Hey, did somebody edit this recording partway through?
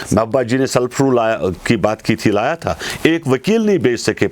no; 0 cuts

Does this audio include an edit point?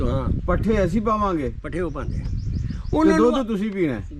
no; 0 cuts

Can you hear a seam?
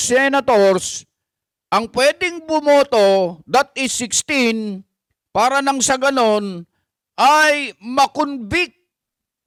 no; 0 cuts

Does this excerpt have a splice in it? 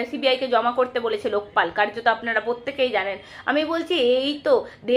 no; 0 cuts

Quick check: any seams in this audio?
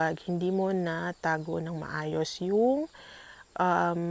no; 0 cuts

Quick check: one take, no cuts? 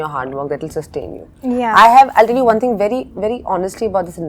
yes; 0 cuts

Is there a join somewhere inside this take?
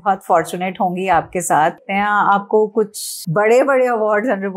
no; 0 cuts

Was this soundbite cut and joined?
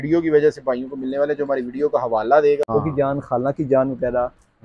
yes; 1 cut; at 2.7 s

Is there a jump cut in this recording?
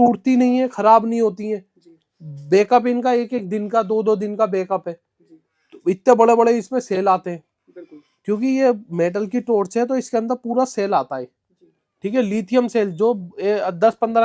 no; 0 cuts

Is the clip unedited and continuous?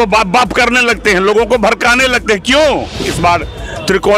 no; 1 cut; at 3.1 s

